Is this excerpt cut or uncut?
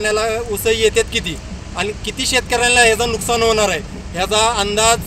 uncut